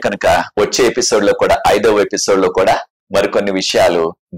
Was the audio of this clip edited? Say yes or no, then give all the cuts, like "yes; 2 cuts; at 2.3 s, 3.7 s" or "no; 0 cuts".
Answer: yes; 1 cut; at 3.0 s